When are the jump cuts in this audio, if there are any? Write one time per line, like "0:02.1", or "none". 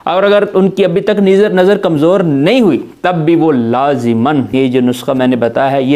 0:04.5